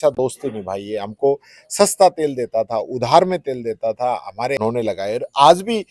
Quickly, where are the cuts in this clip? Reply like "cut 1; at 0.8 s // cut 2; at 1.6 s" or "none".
cut 1; at 4.6 s